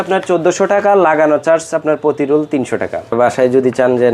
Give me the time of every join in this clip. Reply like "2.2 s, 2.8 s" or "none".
3.1 s